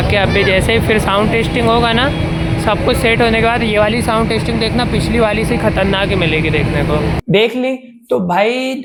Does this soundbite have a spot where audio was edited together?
no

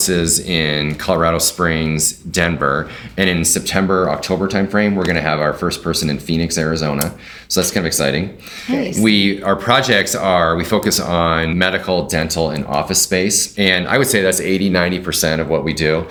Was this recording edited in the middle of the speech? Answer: no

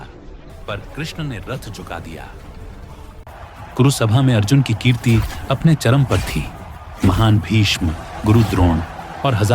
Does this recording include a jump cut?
yes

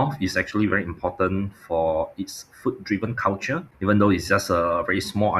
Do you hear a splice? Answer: no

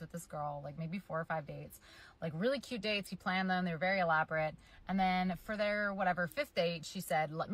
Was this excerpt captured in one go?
no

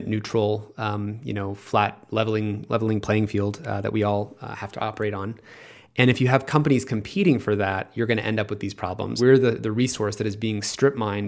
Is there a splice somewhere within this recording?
yes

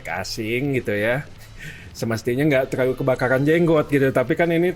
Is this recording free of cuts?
yes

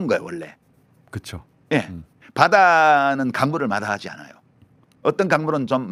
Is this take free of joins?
yes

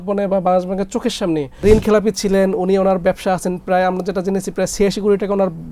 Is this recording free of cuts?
no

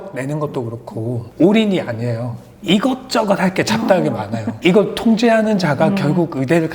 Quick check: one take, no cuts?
no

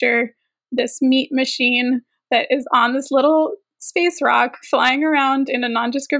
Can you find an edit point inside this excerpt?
no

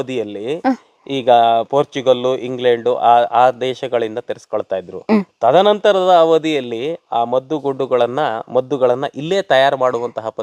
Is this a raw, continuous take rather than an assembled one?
yes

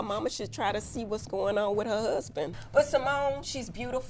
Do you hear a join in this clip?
yes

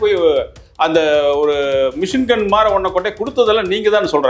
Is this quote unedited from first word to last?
yes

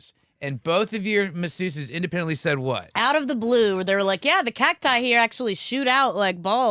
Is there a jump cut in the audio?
no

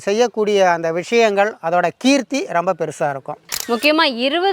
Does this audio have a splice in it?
yes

